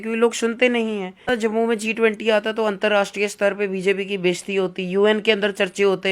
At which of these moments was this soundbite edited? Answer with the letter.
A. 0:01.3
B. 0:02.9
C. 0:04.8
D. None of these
A